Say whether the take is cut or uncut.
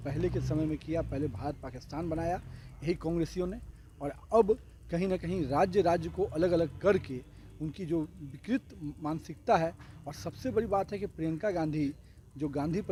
uncut